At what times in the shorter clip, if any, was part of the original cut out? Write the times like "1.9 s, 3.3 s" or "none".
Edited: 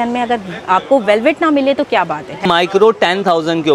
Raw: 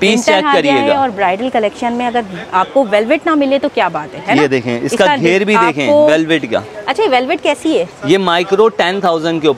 2.4 s